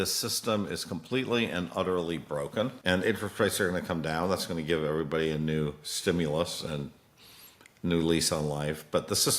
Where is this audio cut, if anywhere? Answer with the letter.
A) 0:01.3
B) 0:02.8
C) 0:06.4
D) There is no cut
B